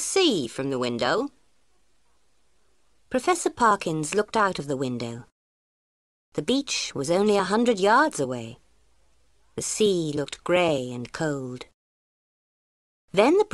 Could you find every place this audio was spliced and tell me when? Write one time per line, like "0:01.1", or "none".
0:07.4

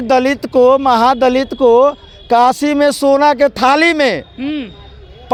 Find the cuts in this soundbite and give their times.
none

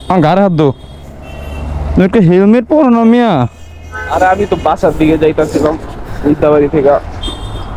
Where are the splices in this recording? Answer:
none

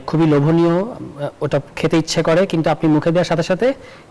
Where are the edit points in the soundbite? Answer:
none

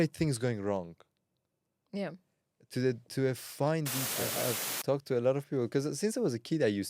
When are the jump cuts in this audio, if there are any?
0:04.3

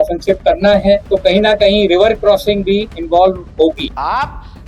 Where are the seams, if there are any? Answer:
0:01.0
0:03.0
0:03.9

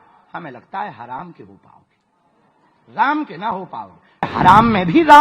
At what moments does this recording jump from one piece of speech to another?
0:04.3

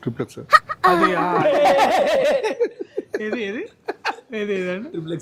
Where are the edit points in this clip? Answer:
none

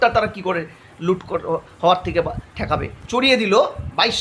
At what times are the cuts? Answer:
0:02.9

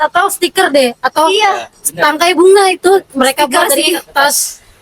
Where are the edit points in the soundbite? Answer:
none

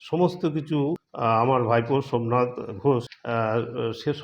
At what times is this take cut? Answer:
0:01.1
0:03.2

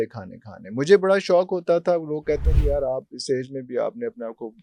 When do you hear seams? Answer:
none

